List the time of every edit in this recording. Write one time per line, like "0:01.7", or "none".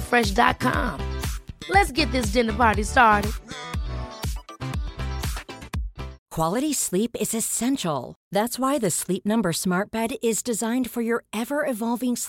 0:06.2

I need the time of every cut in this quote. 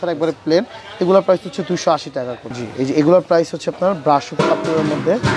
none

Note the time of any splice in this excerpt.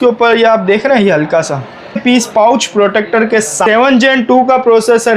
0:02.0
0:03.6

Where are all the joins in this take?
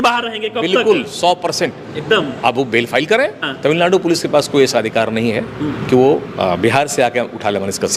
0:03.4

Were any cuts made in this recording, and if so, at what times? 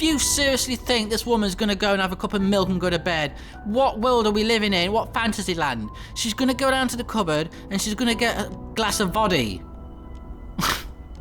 0:08.8

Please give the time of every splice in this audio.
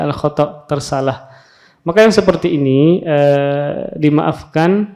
none

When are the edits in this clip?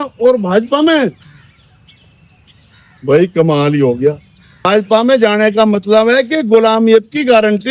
0:04.7

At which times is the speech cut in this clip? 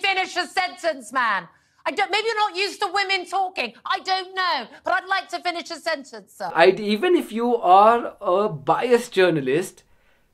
0:06.5

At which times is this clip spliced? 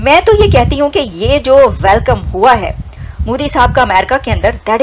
none

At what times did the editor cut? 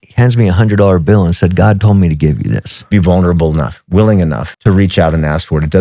0:02.9
0:04.5

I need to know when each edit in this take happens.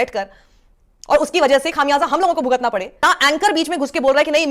0:03.0

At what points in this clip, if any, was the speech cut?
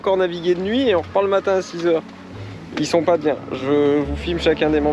none

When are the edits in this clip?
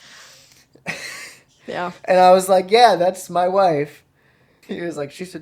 0:04.5

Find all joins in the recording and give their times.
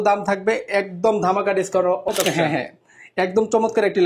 0:02.1

